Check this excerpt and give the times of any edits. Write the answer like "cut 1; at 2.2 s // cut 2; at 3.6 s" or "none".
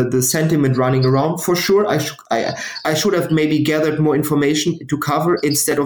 cut 1; at 2.8 s